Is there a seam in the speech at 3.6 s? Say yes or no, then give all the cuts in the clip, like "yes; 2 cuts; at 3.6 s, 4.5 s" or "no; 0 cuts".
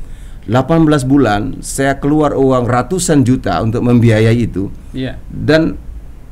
no; 0 cuts